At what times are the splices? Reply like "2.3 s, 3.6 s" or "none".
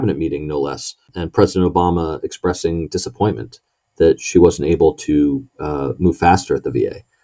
1.1 s